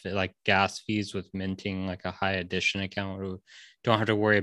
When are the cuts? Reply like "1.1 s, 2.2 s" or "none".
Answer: none